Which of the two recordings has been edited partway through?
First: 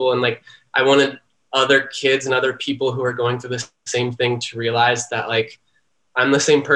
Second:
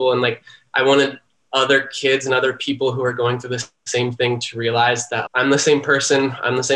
second; 1 cut; at 5.2 s

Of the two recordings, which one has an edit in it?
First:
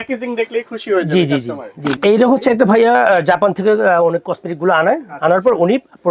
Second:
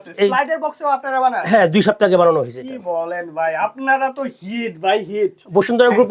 first; 1 cut; at 2.0 s

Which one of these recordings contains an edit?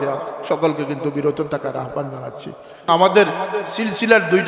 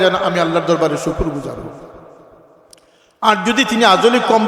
first; 1 cut; at 2.9 s

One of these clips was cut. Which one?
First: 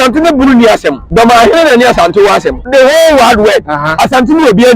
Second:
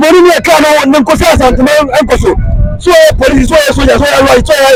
first; 2 cuts; at 1.0 s, 2.6 s

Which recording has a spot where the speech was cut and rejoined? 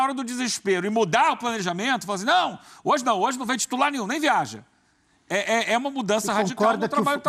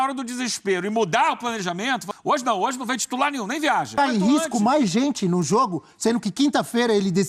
second; 2 cuts; at 2.1 s, 3.9 s

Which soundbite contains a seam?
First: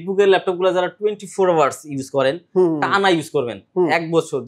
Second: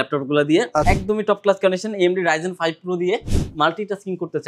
second; 2 cuts; at 0.8 s, 3.3 s

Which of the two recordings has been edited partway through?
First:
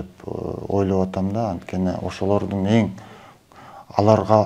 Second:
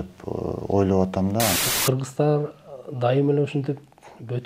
second; 1 cut; at 1.6 s

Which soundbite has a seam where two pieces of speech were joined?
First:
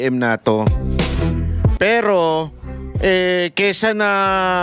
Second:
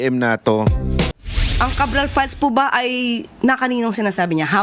second; 1 cut; at 1.1 s

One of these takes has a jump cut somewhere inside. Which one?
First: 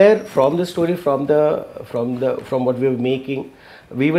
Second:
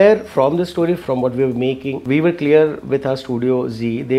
second; 2 cuts; at 1.0 s, 2.0 s

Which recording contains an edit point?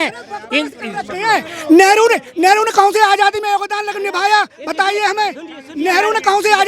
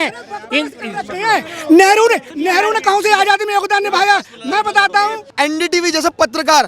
second; 2 cuts; at 2.3 s, 5.2 s

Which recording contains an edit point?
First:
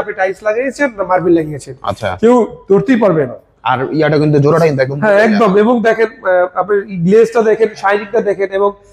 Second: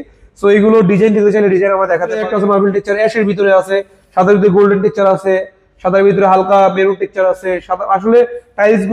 second; 1 cut; at 2.2 s

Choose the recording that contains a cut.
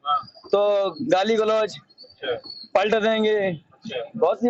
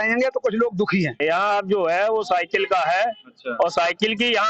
second; 1 cut; at 1.2 s

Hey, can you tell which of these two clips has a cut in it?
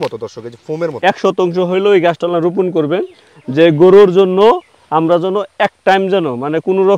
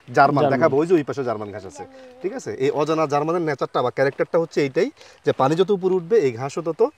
first; 1 cut; at 0.9 s

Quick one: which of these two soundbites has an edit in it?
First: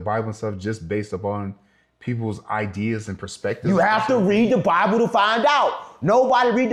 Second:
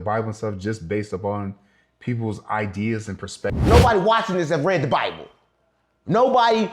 second; 1 cut; at 3.5 s

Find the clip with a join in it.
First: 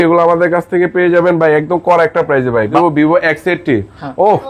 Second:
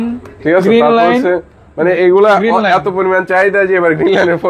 first; 1 cut; at 2.7 s

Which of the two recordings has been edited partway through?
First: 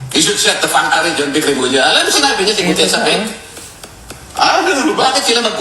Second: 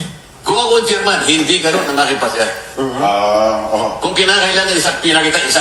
first; 1 cut; at 1.0 s

